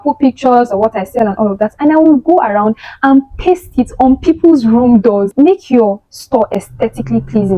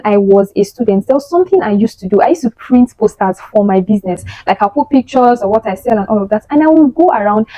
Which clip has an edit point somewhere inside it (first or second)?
first